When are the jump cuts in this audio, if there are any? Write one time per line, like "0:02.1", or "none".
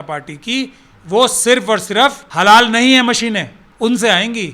0:02.3
0:03.6

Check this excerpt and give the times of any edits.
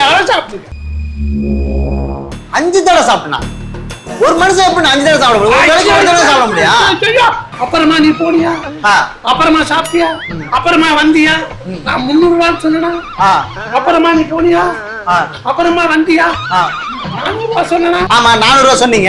0:07.5
0:18.1

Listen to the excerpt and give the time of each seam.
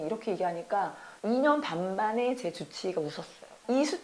0:01.1

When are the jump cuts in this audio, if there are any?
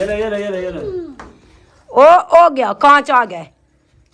none

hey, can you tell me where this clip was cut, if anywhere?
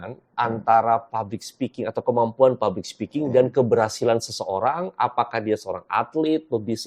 none

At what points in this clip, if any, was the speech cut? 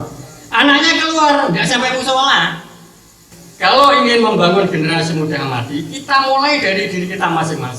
0:03.1

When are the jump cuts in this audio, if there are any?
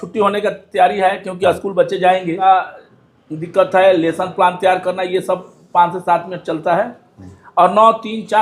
0:02.4

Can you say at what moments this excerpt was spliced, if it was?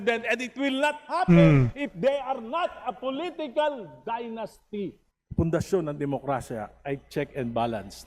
0:05.0

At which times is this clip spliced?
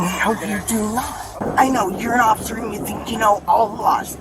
0:01.4

